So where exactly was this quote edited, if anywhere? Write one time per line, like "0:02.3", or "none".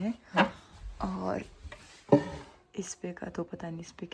none